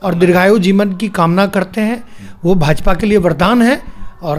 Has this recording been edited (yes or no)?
no